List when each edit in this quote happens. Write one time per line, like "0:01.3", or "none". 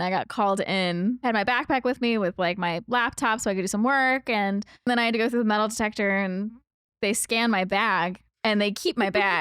0:01.2
0:04.9
0:08.3